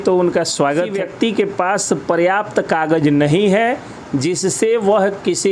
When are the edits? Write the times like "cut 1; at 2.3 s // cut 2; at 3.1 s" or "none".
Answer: cut 1; at 0.9 s